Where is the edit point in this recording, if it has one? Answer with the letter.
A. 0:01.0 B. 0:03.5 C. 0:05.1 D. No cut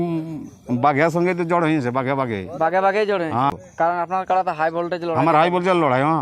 B